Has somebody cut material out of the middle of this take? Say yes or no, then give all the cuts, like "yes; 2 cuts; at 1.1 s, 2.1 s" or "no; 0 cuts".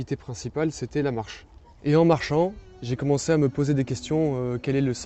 no; 0 cuts